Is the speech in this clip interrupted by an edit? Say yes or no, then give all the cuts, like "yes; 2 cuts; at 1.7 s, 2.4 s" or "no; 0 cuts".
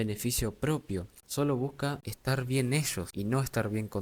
yes; 3 cuts; at 1.2 s, 2.1 s, 3.0 s